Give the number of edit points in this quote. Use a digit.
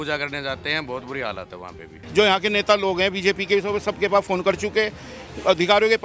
1